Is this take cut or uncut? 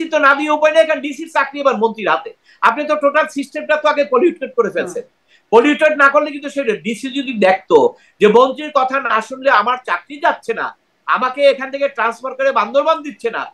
uncut